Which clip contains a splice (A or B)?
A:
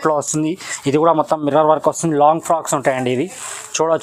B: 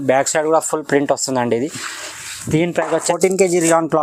B